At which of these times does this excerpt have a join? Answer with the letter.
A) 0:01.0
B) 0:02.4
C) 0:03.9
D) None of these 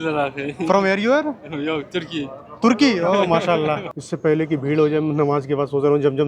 C